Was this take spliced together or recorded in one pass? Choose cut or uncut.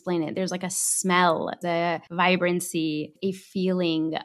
cut